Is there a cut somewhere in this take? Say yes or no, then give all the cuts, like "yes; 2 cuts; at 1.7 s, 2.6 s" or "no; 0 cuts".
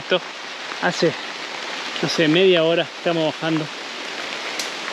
no; 0 cuts